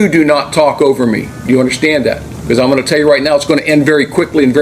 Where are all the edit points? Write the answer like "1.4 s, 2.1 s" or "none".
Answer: 2.3 s